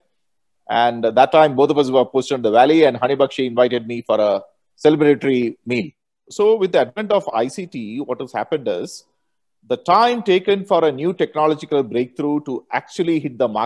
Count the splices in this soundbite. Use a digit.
1